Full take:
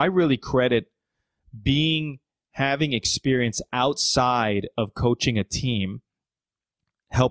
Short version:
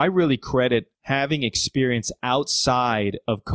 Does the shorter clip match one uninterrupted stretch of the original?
no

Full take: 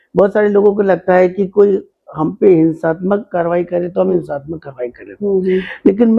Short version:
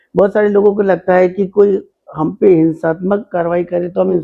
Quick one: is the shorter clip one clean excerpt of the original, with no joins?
yes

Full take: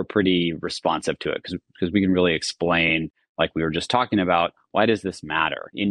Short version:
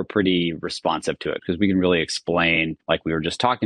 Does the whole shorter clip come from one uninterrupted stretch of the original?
no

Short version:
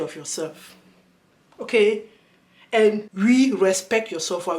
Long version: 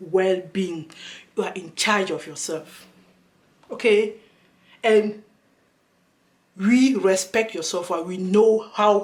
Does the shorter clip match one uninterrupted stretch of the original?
no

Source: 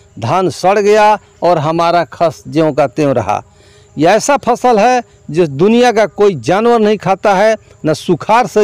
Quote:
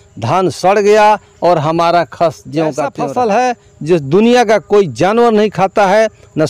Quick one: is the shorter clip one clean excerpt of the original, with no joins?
no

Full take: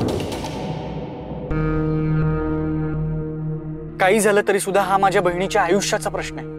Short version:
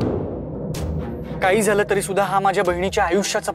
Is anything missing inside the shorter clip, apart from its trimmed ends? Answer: yes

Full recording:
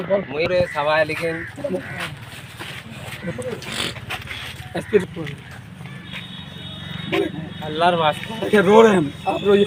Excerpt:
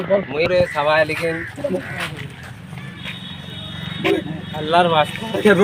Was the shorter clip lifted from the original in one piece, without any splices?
no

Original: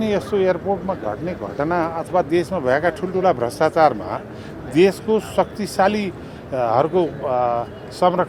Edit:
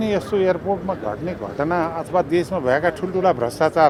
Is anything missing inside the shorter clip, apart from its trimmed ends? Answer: no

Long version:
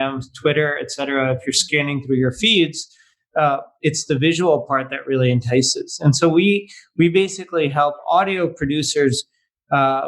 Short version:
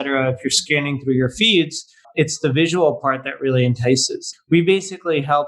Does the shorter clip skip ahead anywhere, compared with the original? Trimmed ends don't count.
yes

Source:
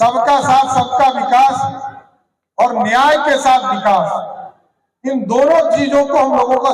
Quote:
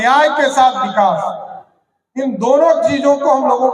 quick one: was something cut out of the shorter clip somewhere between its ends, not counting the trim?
no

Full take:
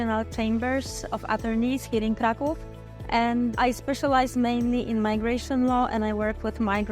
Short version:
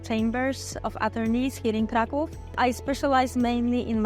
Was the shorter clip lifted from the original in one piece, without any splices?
no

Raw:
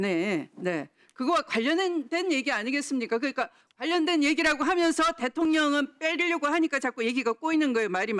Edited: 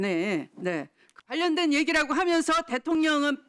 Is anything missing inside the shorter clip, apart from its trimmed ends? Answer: yes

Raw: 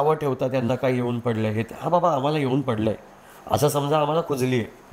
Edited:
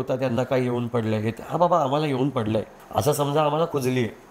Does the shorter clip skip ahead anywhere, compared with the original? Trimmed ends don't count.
yes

